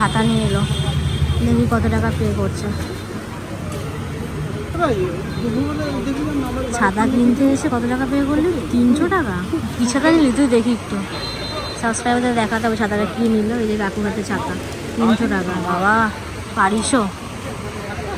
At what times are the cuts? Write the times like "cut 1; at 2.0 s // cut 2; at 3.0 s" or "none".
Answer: none